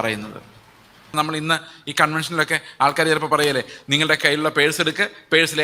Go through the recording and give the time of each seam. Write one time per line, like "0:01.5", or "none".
0:01.1